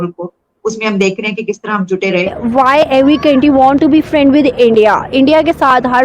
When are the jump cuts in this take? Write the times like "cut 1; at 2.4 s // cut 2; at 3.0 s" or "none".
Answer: cut 1; at 2.4 s